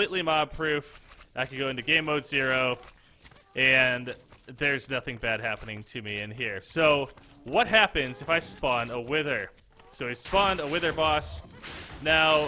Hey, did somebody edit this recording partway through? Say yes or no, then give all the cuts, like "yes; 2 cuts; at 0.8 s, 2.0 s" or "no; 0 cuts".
no; 0 cuts